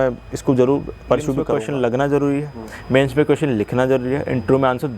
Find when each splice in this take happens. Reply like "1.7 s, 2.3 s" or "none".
1.5 s